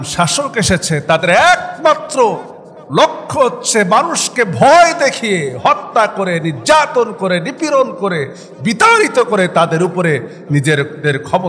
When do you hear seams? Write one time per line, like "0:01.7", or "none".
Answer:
none